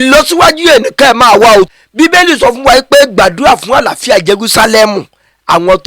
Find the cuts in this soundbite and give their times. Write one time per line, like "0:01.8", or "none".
0:01.7